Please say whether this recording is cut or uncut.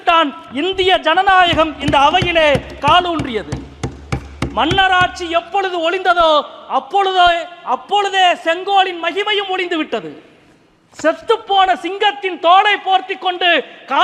uncut